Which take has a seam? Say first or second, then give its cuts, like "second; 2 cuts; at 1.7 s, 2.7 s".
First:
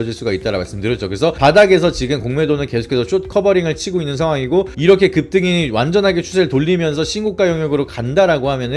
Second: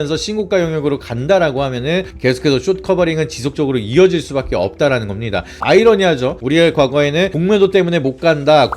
second; 1 cut; at 5.5 s